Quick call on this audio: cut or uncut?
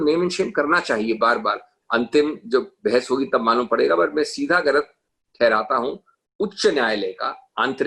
cut